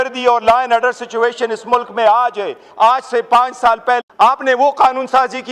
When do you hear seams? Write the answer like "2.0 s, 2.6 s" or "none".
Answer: 4.1 s